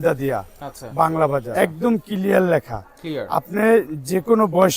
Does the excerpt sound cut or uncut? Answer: cut